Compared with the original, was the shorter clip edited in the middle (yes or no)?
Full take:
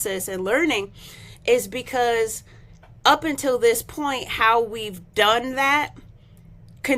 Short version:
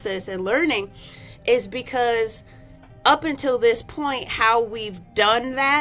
no